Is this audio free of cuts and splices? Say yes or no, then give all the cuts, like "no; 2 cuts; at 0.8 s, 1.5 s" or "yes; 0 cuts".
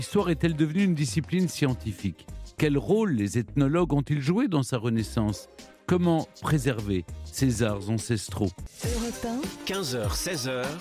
no; 1 cut; at 8.7 s